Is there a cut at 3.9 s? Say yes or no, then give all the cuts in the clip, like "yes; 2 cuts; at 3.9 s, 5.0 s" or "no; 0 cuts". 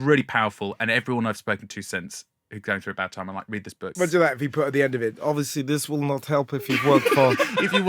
yes; 1 cut; at 3.9 s